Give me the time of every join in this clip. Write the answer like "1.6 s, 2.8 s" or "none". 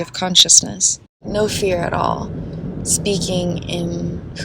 1.2 s